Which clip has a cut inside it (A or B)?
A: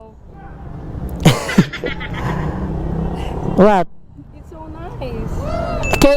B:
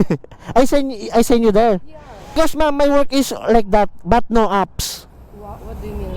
B